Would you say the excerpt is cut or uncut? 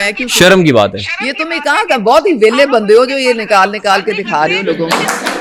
uncut